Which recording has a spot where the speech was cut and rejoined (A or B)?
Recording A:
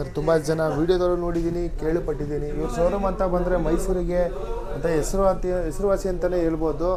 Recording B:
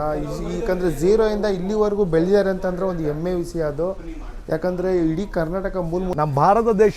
B